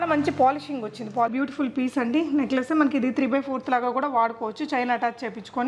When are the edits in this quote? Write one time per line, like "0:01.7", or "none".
0:01.3